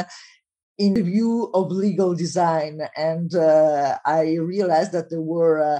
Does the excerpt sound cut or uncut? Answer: cut